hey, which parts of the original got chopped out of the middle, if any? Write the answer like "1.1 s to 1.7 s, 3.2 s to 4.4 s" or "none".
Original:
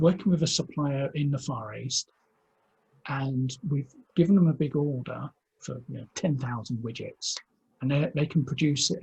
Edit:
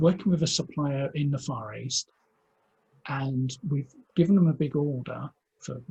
none